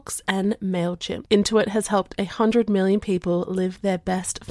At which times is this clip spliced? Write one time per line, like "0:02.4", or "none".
0:01.1